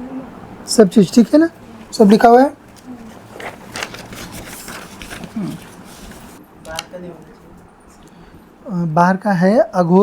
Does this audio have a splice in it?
yes; 1 cut; at 6.4 s

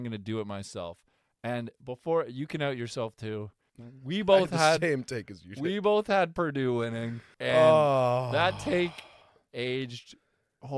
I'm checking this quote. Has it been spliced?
no; 0 cuts

